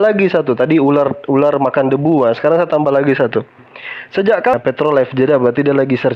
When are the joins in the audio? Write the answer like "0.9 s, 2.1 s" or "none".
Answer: 4.5 s